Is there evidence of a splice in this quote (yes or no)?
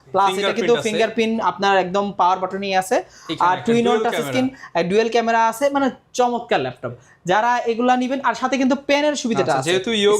no